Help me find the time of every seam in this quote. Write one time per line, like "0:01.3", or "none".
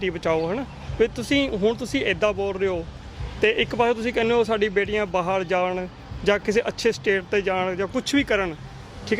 none